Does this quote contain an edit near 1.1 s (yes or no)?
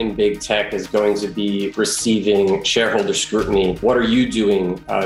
no